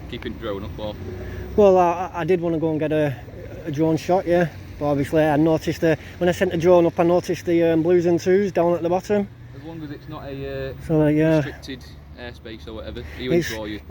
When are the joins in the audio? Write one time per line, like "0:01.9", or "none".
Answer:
none